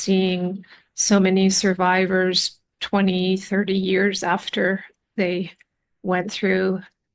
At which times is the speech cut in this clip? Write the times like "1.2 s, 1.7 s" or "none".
none